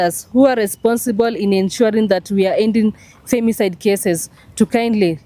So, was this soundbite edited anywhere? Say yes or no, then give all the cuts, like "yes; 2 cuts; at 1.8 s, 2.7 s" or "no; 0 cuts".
no; 0 cuts